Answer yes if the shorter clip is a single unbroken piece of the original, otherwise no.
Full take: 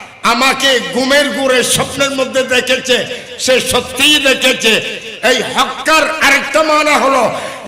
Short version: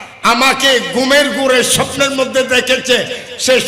yes